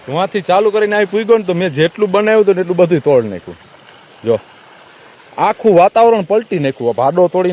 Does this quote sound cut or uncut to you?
uncut